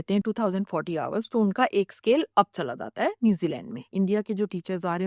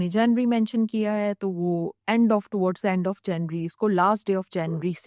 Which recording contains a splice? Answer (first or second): first